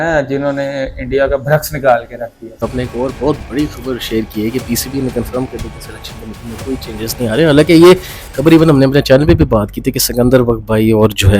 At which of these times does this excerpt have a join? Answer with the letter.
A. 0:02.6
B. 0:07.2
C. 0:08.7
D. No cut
A